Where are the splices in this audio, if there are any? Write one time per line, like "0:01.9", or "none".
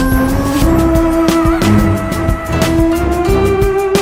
none